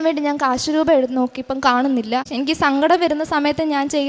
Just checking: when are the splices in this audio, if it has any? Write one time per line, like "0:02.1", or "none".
0:02.3